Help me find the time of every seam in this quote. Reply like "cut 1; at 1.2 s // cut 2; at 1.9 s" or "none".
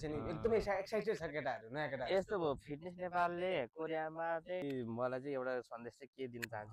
cut 1; at 4.6 s